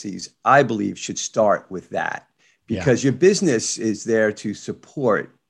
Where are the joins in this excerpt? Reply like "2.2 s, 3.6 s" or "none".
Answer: none